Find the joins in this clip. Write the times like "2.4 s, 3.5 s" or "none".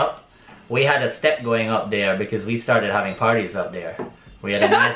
none